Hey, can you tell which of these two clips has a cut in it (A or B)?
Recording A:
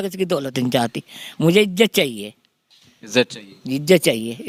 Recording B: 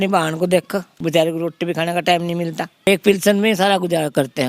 B